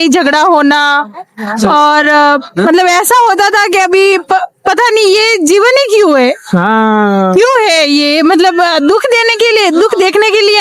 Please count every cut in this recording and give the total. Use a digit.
0